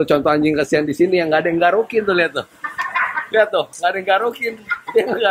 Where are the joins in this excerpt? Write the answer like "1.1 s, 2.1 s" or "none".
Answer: none